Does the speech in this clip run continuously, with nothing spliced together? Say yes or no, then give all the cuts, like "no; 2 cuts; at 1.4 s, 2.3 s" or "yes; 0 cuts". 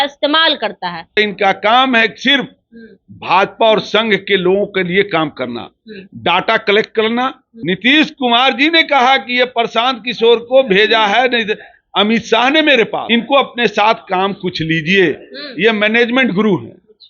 no; 3 cuts; at 1.2 s, 7.5 s, 13.0 s